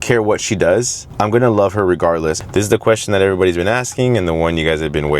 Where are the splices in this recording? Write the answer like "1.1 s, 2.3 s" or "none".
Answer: 1.0 s, 2.4 s